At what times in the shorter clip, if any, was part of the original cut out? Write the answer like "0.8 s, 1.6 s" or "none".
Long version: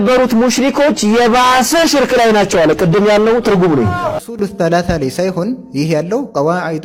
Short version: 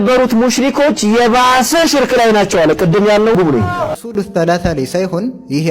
3.3 s